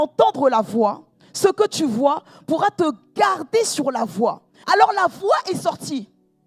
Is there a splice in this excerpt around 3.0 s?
no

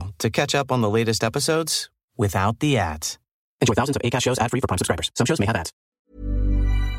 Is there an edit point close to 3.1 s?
no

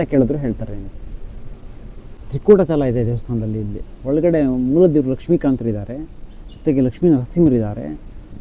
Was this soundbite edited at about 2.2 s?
yes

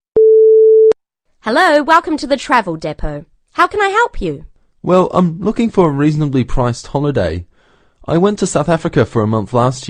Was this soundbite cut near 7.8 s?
no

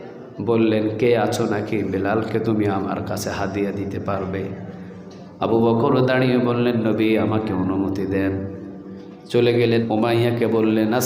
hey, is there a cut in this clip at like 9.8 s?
yes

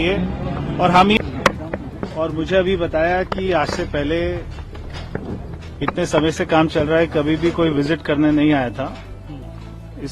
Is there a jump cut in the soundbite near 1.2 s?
yes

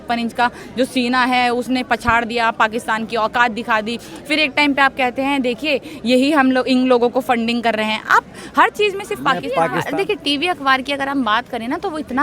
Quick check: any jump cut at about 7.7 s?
no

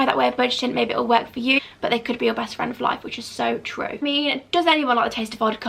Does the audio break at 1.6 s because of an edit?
yes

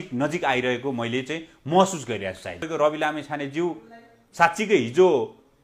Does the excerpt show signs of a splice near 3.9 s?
no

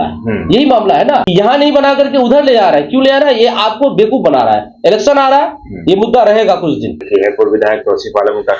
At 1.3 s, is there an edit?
yes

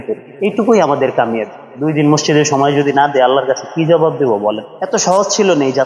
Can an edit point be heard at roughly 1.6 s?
yes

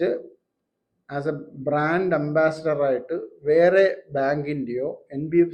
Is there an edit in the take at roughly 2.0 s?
no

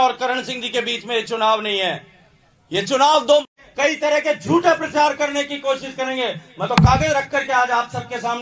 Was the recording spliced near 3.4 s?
yes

